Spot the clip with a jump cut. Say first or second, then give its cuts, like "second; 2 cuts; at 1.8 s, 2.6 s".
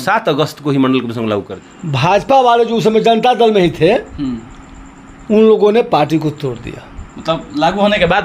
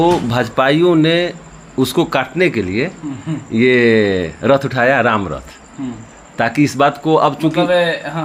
first; 1 cut; at 1.5 s